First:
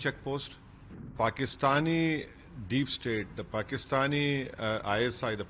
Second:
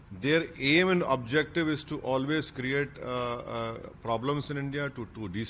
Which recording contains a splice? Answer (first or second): first